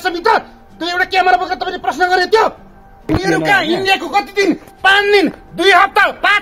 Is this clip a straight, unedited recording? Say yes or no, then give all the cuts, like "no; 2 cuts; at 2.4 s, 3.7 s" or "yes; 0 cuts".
no; 1 cut; at 3.1 s